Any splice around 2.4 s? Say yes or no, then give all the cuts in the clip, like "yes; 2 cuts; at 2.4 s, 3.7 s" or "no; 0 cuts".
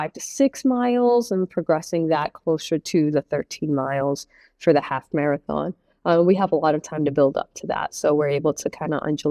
no; 0 cuts